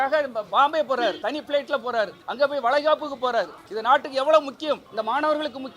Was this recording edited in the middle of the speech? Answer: yes; 4 cuts; at 1.2 s, 2.2 s, 3.6 s, 4.9 s

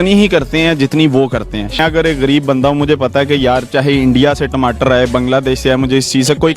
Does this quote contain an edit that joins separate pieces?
no; 0 cuts

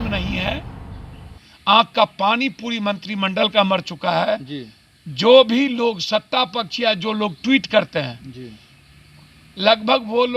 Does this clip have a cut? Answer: no; 0 cuts

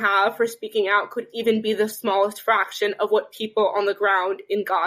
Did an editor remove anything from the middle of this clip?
no; 0 cuts

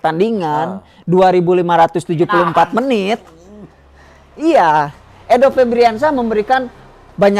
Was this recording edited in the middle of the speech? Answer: no; 0 cuts

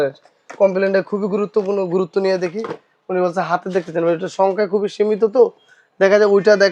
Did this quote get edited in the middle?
no; 0 cuts

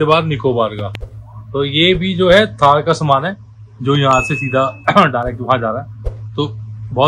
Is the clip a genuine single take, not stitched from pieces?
yes; 0 cuts

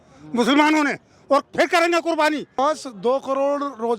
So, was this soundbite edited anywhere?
yes; 1 cut; at 2.6 s

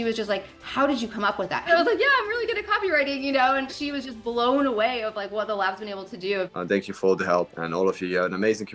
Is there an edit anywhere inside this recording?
yes; 4 cuts; at 1.6 s, 3.8 s, 6.5 s, 7.6 s

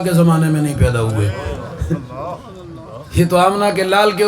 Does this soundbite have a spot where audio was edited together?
no; 0 cuts

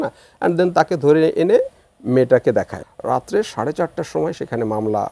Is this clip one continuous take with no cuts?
no; 1 cut; at 2.8 s

